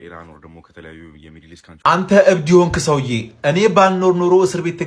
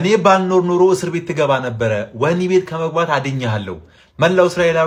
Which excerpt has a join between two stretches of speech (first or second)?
first